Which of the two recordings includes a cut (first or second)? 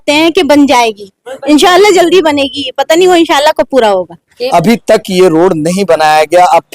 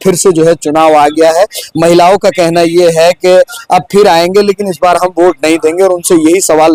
first